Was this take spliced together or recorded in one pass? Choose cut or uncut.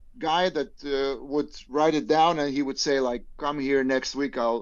uncut